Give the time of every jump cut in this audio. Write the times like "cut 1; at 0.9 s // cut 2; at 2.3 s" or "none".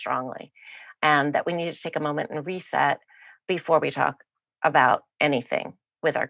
none